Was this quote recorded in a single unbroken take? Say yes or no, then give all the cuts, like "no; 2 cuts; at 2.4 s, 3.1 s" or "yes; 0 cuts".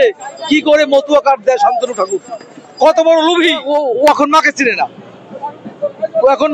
no; 1 cut; at 3.6 s